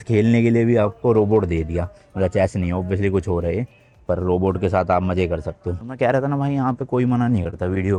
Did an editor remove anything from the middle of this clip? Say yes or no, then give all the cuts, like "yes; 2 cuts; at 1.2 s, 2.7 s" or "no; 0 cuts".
no; 0 cuts